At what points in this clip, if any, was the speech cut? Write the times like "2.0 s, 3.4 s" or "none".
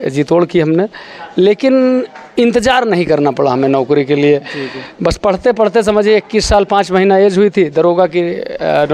none